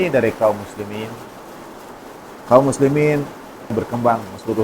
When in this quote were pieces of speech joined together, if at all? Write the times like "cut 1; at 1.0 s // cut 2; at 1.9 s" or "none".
cut 1; at 3.7 s

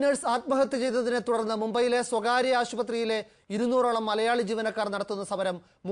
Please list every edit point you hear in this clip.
none

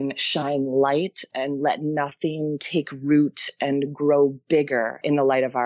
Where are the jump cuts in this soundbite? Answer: cut 1; at 1.3 s

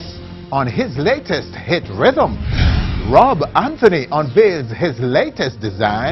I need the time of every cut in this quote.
cut 1; at 2.4 s

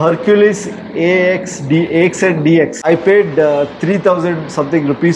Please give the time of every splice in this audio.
cut 1; at 2.8 s

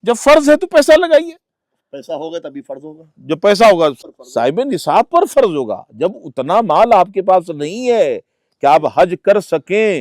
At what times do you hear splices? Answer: cut 1; at 4.0 s

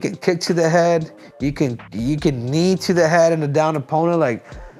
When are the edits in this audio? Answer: none

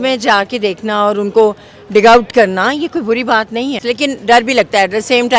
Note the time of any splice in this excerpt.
cut 1; at 3.8 s

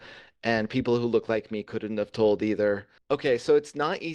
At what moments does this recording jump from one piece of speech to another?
cut 1; at 2.9 s

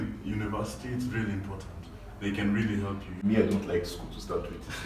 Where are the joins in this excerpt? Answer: cut 1; at 3.1 s

